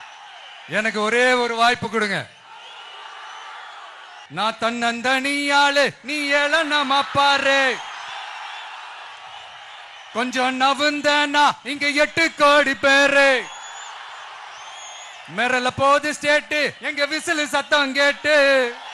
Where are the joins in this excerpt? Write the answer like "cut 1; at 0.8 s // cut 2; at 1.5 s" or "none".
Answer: cut 1; at 4.2 s